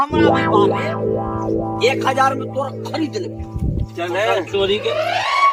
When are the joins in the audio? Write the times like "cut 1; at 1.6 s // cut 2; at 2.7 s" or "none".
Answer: none